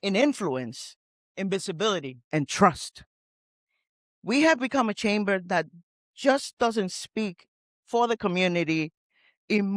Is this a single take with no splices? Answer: yes; 0 cuts

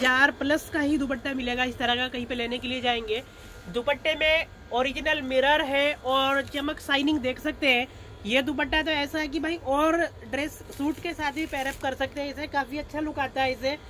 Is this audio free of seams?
yes; 0 cuts

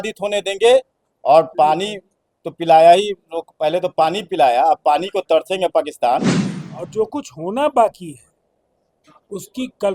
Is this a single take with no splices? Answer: no; 1 cut; at 6.4 s

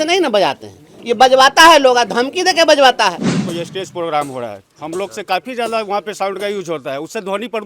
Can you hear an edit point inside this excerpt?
yes; 1 cut; at 3.4 s

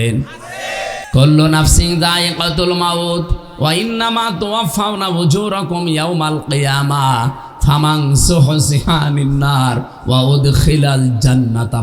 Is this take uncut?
no; 1 cut; at 1.0 s

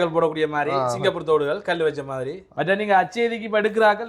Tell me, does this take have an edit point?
yes; 1 cut; at 2.4 s

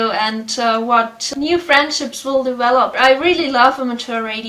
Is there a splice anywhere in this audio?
yes; 2 cuts; at 1.3 s, 2.9 s

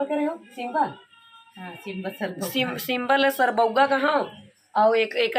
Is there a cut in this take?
no; 0 cuts

